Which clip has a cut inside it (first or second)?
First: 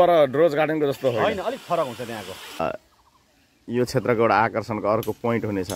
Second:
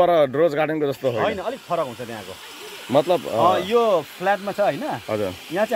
first